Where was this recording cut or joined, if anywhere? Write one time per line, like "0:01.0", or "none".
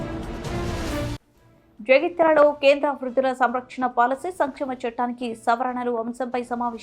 0:01.1